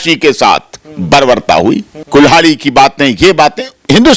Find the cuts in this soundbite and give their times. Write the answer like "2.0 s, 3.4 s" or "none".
1.9 s